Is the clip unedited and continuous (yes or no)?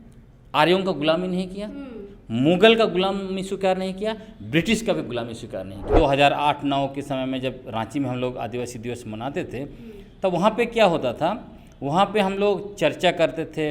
no